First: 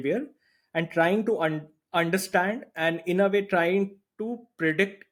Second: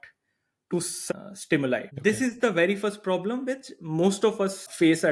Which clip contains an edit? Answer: second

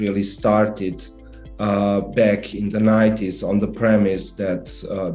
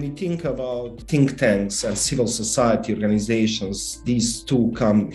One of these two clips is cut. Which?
second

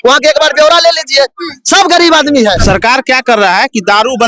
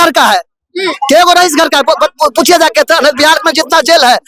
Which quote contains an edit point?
first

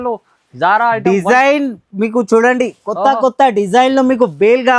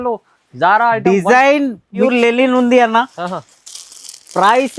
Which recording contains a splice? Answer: second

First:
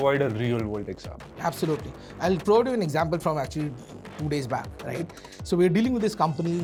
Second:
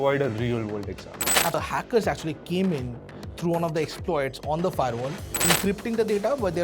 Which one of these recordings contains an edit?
second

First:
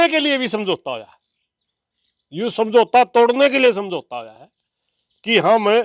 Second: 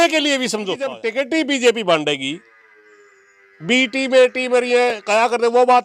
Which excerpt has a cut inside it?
second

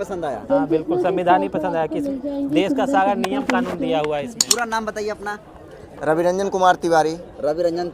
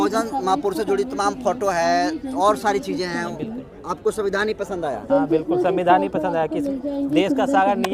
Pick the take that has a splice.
first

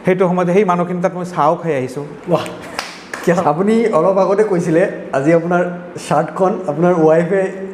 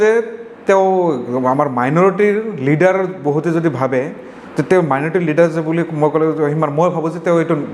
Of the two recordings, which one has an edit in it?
first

